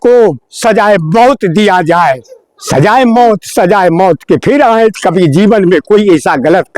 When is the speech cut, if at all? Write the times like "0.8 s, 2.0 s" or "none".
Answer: none